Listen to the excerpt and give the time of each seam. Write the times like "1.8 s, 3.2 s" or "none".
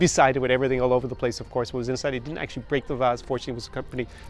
none